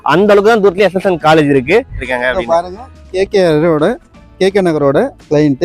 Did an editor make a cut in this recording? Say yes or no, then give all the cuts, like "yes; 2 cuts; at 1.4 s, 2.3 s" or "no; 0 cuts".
yes; 1 cut; at 2.0 s